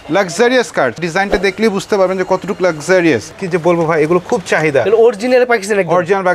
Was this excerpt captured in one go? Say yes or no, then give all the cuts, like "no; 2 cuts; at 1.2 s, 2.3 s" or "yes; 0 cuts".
no; 2 cuts; at 1.0 s, 3.3 s